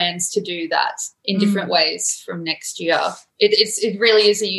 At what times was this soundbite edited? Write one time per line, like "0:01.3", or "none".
0:03.2